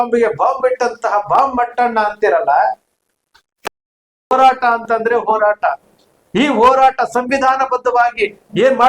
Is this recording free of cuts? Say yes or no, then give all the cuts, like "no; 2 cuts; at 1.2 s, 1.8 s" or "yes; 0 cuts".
no; 1 cut; at 3.7 s